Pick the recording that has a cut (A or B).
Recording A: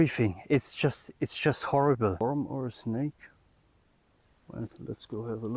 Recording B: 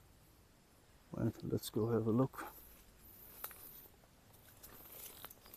A